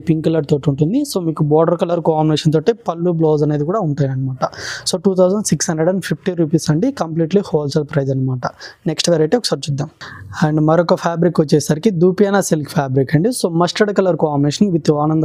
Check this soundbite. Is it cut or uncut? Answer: uncut